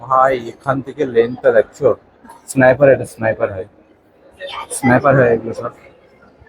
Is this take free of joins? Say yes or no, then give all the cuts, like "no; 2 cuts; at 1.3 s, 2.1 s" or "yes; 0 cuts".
yes; 0 cuts